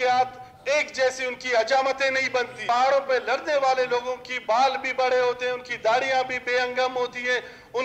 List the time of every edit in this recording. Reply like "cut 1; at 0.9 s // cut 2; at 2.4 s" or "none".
cut 1; at 2.6 s